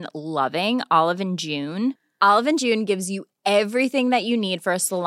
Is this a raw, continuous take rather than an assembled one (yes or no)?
yes